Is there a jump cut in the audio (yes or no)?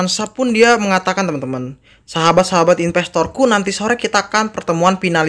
no